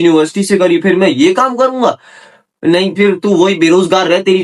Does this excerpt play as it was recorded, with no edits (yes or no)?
yes